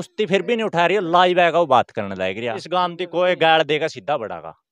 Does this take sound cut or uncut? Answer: cut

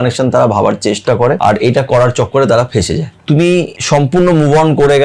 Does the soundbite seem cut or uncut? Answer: cut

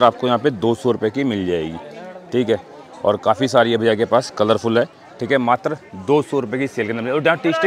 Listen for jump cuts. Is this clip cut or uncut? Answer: uncut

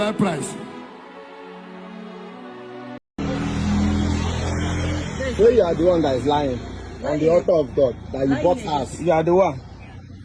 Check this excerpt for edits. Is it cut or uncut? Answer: cut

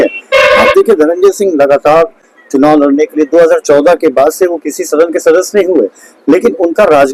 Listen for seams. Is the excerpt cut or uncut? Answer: uncut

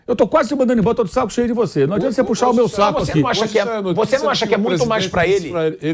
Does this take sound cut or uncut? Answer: uncut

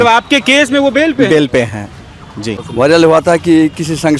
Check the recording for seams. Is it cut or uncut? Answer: cut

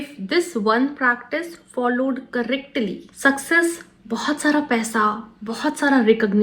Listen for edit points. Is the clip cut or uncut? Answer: cut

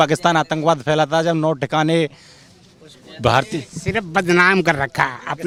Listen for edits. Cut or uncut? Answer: uncut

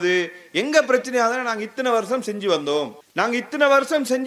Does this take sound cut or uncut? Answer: cut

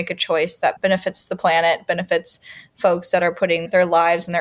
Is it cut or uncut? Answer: uncut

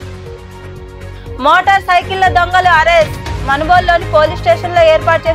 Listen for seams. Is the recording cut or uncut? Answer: cut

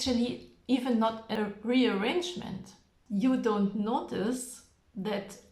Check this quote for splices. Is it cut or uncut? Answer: cut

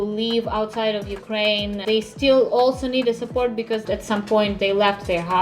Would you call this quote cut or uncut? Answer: cut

